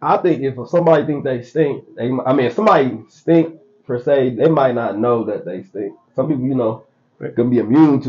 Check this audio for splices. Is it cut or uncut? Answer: uncut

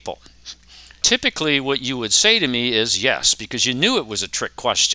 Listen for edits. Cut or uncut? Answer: cut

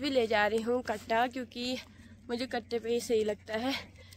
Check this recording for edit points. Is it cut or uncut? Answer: uncut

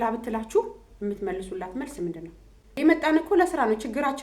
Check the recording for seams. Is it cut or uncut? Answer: cut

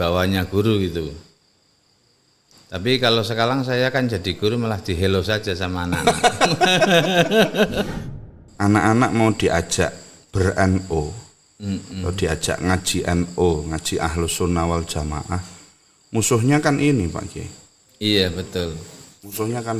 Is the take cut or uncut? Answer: cut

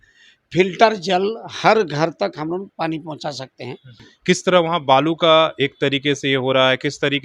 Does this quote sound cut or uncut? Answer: cut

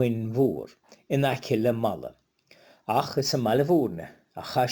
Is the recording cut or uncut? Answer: uncut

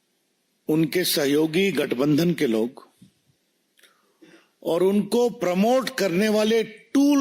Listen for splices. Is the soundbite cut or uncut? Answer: uncut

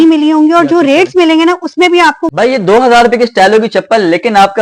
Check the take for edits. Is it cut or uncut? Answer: cut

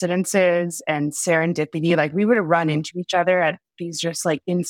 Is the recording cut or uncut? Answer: uncut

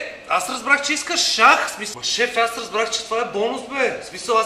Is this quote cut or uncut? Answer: uncut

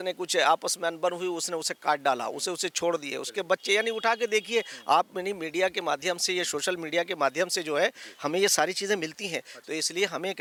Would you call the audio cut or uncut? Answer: uncut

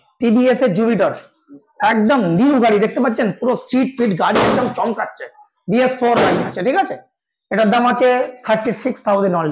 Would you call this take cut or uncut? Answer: uncut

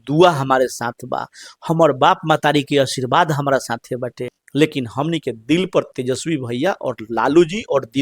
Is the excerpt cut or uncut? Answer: cut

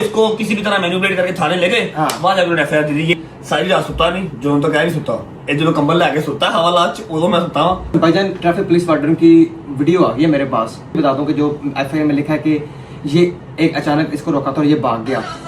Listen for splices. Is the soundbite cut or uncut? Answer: cut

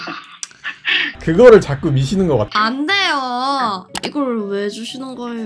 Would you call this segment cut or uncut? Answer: cut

